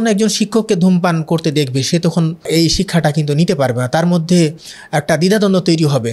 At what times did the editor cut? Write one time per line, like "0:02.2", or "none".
0:02.5